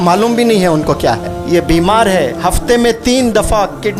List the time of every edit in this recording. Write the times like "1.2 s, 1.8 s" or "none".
1.3 s